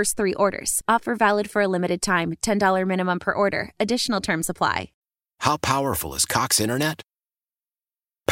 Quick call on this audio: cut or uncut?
cut